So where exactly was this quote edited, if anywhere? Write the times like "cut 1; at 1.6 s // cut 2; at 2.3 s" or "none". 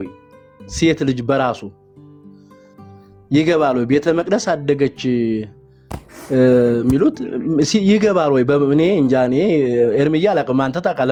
none